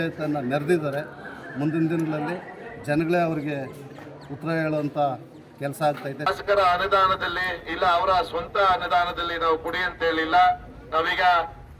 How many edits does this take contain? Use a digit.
1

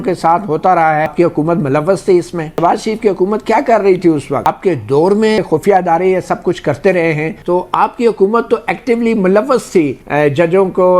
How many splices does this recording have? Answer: 5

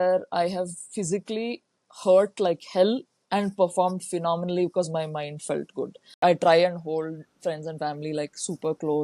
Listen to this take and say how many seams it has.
1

